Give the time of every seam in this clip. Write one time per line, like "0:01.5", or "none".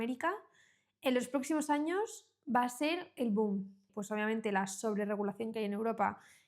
0:03.9